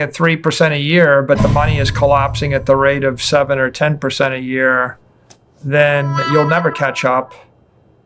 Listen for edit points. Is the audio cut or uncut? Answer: uncut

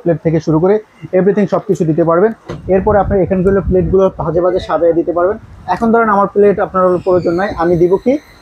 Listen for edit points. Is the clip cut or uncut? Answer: uncut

